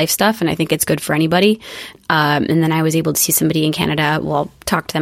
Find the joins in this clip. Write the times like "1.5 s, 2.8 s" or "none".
1.9 s